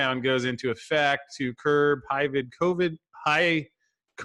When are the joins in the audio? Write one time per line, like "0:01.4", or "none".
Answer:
none